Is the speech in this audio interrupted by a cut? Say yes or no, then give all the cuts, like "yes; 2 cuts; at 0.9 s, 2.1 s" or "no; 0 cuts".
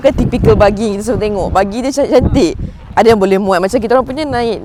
no; 0 cuts